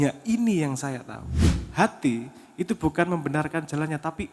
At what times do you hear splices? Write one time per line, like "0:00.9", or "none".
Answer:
0:01.6

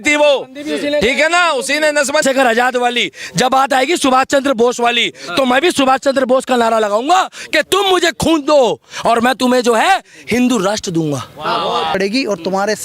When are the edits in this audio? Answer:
0:02.2
0:12.0

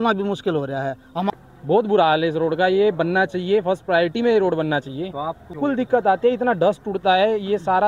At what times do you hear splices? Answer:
0:01.3
0:05.5

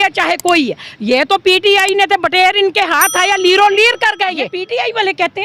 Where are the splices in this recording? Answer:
0:04.6

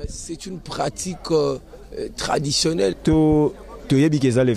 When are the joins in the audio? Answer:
0:03.0

